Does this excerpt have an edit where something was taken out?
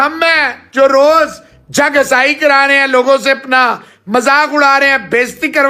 no; 0 cuts

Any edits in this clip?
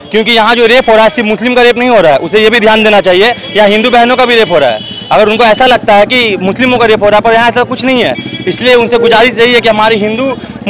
no; 0 cuts

